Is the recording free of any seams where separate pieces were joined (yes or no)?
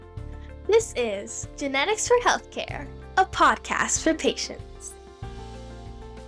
yes